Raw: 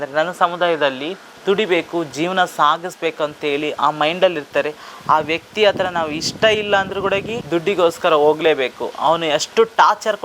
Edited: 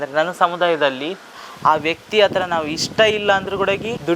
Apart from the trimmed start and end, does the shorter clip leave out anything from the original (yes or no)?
yes